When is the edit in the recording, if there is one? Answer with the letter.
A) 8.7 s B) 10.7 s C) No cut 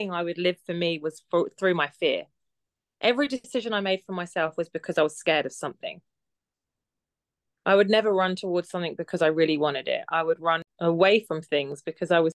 B